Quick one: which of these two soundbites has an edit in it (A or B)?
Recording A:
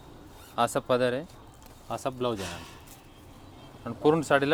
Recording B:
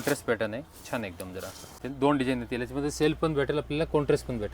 B